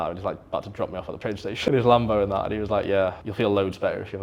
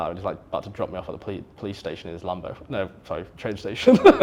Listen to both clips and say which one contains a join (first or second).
first